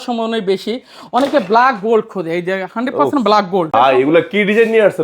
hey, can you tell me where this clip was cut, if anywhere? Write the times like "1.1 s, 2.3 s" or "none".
3.7 s